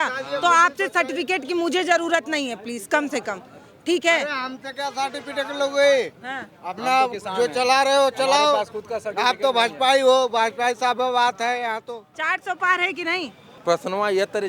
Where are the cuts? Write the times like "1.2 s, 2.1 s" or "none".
12.1 s, 13.5 s